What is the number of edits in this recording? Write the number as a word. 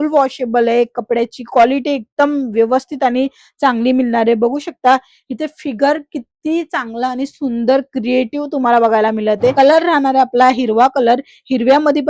one